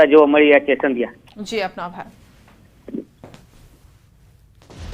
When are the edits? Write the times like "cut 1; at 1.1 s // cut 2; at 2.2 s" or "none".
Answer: cut 1; at 1.7 s